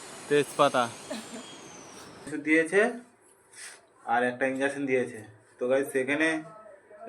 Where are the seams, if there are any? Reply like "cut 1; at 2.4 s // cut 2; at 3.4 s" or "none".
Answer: cut 1; at 2.3 s